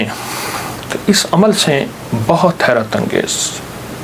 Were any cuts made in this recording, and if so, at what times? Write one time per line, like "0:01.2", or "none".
none